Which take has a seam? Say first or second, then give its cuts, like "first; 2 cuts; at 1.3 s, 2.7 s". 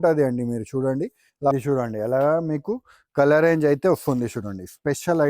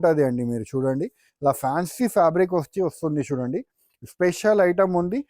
first; 1 cut; at 1.5 s